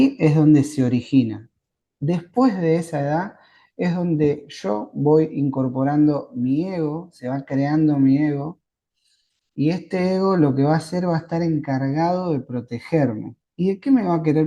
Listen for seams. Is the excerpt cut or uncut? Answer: uncut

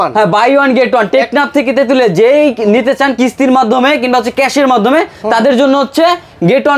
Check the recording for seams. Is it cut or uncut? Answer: uncut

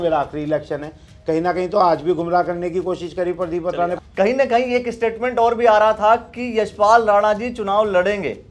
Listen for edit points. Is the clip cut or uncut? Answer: cut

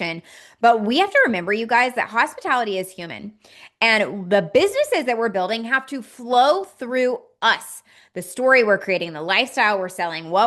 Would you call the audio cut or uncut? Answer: uncut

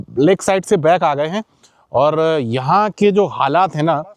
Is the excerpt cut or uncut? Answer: uncut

